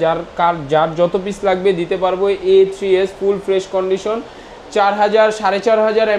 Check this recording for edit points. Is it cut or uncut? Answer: uncut